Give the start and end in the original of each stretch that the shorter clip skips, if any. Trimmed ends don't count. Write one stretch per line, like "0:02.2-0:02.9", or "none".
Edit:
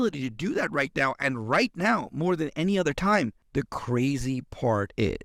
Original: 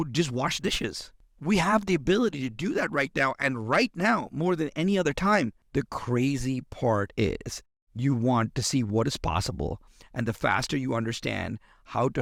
none